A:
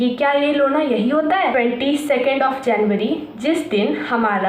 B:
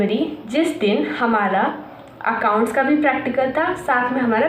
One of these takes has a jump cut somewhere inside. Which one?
A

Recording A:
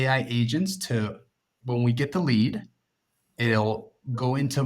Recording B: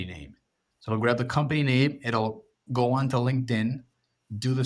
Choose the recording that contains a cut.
A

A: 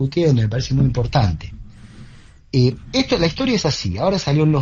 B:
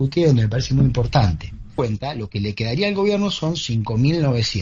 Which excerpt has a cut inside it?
B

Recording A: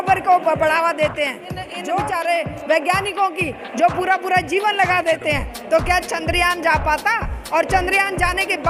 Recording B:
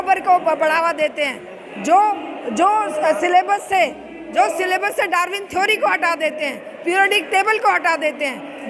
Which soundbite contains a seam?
A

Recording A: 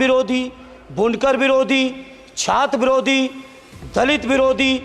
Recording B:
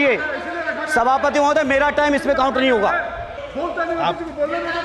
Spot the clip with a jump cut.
B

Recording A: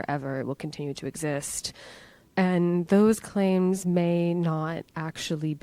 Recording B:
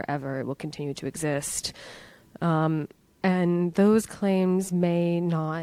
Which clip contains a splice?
A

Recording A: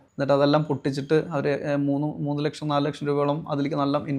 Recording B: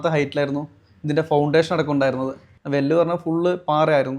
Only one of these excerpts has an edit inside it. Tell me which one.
B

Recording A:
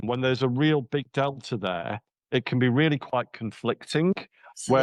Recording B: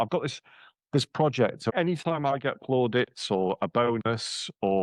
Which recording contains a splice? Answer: B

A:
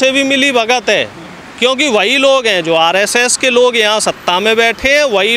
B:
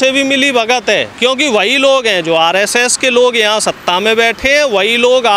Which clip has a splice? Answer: B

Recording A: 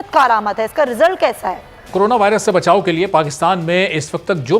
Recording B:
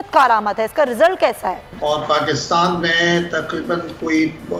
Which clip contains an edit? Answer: A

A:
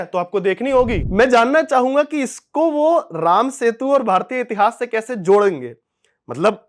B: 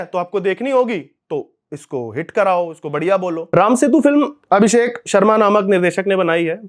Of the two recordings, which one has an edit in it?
A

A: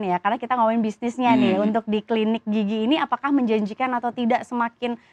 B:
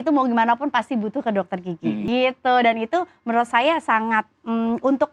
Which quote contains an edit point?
B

